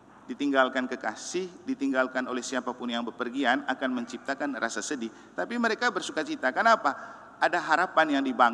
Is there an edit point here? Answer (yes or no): no